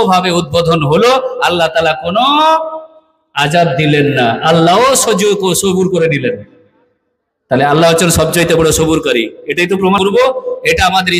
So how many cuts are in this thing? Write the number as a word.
one